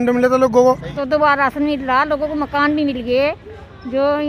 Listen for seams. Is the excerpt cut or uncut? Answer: cut